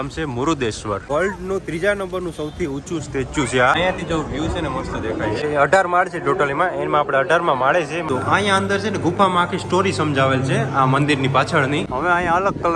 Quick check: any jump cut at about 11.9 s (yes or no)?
yes